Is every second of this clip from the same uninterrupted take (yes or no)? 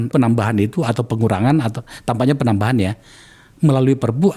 yes